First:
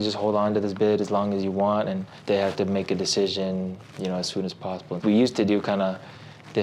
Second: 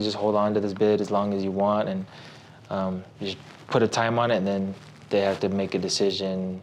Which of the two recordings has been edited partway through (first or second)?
first